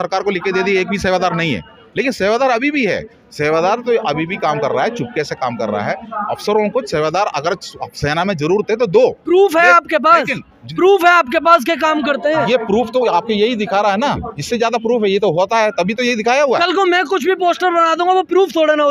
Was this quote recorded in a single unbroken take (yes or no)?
yes